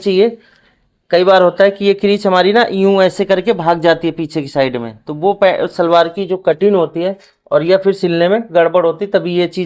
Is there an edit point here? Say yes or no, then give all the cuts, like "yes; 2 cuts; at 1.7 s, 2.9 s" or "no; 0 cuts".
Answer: no; 0 cuts